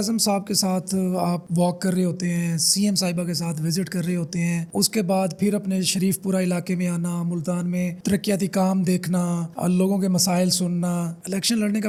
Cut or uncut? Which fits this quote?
uncut